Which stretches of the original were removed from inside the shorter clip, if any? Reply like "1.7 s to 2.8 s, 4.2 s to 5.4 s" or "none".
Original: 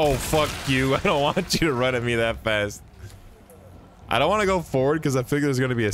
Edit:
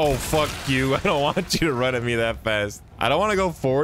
2.8 s to 3.9 s